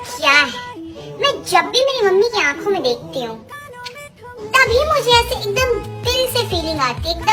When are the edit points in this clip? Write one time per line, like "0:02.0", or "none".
none

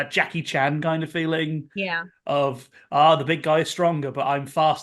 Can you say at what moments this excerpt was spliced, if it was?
none

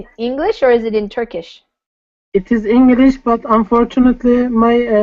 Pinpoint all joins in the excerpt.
0:03.4

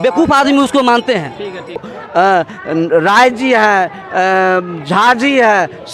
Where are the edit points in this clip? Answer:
0:01.9

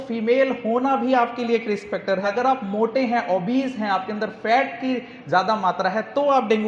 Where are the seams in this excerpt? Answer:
0:02.3

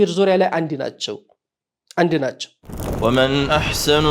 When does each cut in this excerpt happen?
0:02.8

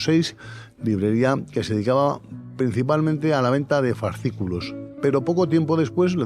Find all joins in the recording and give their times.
0:04.8

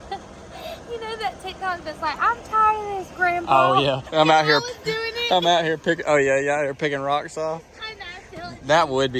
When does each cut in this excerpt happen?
0:04.0

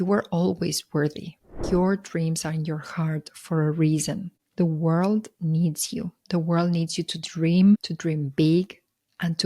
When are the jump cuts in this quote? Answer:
0:01.5

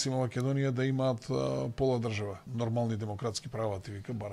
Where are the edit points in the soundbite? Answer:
0:02.4

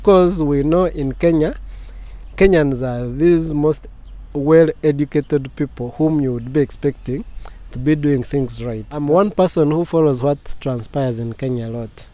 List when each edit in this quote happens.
0:08.9

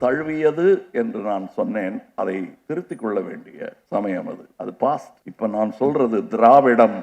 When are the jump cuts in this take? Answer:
0:02.6
0:03.8
0:04.4
0:05.2

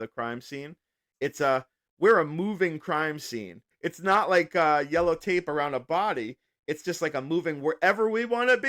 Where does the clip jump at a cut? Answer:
0:03.6

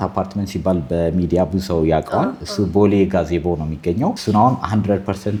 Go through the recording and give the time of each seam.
none

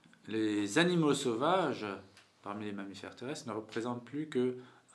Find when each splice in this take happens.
none

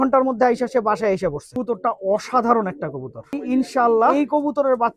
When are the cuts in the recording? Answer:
0:01.5
0:03.3
0:04.1

